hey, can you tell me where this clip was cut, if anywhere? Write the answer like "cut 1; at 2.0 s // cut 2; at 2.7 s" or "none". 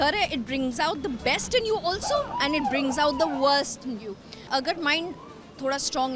cut 1; at 4.5 s